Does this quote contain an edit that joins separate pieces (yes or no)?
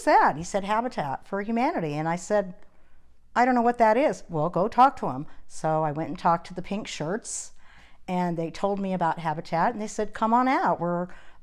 no